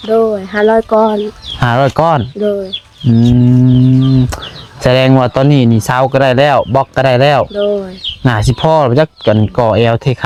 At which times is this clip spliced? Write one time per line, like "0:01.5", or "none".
none

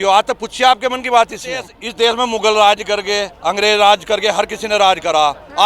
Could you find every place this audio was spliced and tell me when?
0:01.8

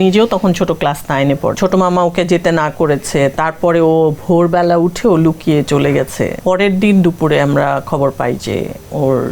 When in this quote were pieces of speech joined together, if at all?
0:01.6
0:06.4

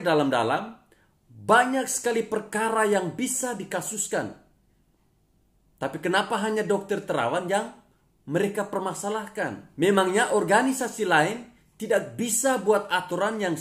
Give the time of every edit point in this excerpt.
0:09.6

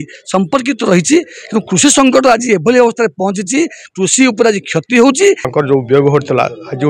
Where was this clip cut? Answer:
0:05.4

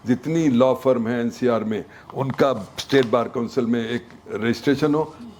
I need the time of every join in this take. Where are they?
none

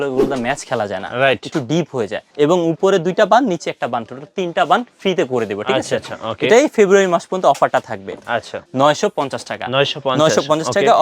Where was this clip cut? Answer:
0:02.2
0:08.5

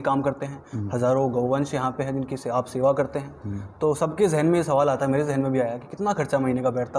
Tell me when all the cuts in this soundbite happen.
none

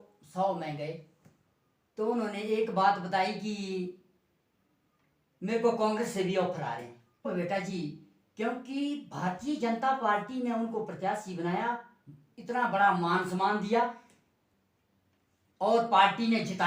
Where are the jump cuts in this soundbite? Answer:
0:07.3

